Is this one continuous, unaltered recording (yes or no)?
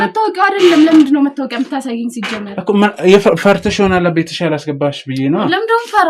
yes